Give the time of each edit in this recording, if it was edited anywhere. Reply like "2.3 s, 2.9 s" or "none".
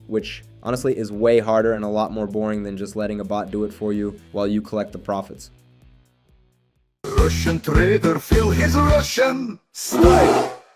7.1 s